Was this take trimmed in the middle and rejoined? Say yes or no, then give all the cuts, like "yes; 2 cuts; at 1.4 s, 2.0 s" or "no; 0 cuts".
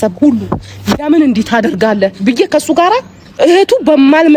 yes; 1 cut; at 3.2 s